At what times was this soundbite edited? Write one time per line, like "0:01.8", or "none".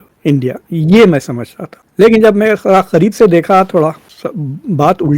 0:04.0